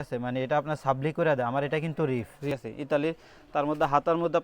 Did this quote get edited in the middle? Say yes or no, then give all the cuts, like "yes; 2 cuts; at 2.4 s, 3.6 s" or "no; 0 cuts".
yes; 1 cut; at 2.5 s